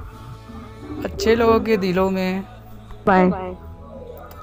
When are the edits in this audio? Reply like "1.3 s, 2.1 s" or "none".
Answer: 3.1 s